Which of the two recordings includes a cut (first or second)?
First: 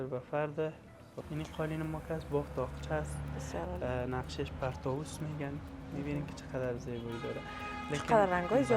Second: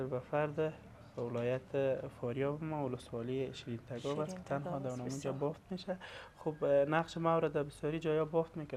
first